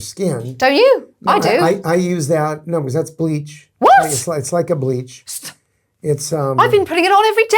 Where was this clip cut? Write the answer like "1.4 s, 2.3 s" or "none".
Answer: none